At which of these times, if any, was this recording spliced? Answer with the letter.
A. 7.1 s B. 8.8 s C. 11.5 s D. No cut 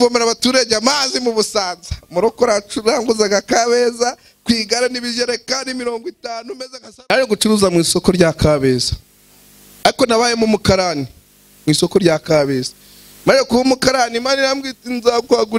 A